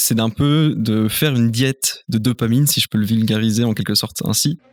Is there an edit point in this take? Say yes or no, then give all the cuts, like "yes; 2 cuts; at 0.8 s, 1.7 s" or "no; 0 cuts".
no; 0 cuts